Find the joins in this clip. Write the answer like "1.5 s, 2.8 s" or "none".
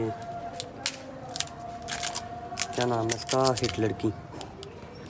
none